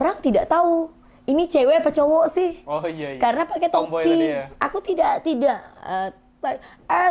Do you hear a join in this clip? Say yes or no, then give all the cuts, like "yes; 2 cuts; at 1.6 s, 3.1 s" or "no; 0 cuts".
no; 0 cuts